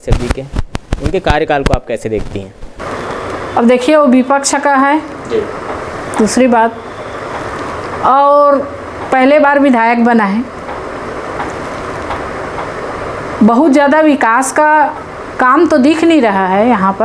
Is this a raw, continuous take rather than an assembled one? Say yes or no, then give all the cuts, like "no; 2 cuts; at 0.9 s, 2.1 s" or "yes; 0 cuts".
yes; 0 cuts